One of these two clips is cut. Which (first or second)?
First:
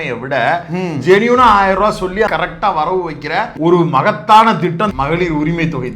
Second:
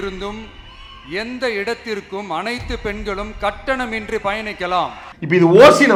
first